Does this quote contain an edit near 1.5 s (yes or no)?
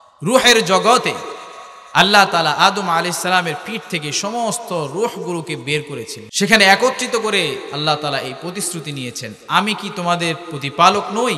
no